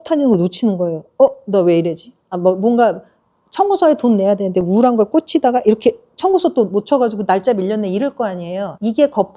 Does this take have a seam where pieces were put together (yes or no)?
no